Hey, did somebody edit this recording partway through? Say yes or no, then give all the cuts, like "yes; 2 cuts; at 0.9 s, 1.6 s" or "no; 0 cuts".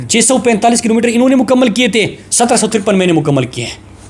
no; 0 cuts